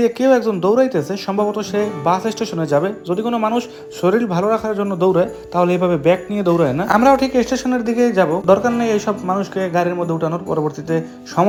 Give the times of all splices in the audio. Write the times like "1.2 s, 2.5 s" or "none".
none